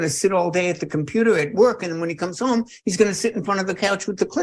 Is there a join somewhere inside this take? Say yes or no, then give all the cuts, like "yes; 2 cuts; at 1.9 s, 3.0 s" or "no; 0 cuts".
no; 0 cuts